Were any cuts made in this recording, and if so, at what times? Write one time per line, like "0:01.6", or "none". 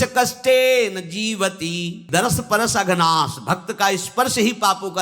0:02.0